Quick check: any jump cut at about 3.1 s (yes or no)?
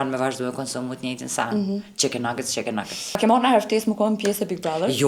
yes